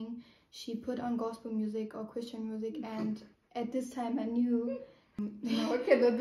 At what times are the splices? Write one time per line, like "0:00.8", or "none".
0:05.3